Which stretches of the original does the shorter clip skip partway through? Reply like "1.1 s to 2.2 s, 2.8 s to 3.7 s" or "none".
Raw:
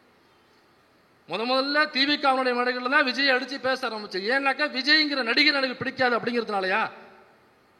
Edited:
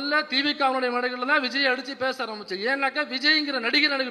none